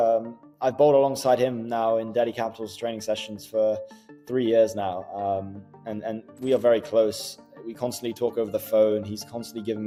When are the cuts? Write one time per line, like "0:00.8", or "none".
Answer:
none